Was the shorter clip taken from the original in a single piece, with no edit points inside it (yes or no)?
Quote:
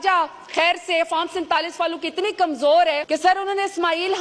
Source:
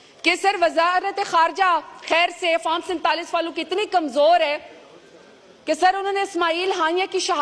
no